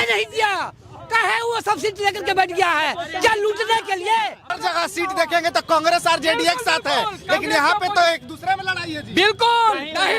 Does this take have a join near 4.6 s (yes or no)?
yes